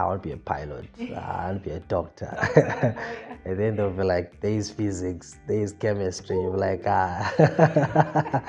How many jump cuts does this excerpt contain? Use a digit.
0